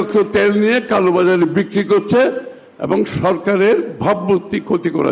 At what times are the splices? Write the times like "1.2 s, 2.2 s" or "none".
none